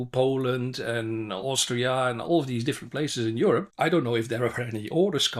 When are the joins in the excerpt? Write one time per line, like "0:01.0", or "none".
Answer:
0:03.7